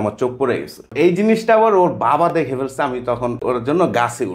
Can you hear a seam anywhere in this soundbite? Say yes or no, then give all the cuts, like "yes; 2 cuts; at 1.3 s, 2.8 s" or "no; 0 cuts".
yes; 2 cuts; at 0.9 s, 3.4 s